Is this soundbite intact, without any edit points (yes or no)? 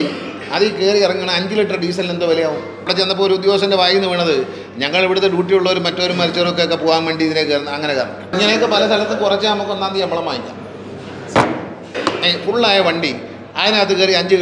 no